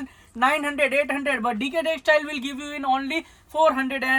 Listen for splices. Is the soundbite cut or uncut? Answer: uncut